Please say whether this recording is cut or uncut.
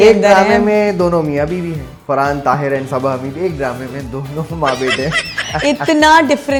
uncut